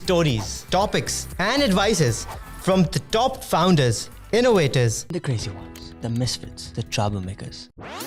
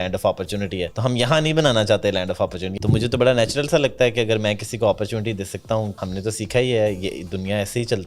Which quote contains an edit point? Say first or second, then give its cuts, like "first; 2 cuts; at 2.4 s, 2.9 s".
second; 3 cuts; at 0.9 s, 2.6 s, 6.0 s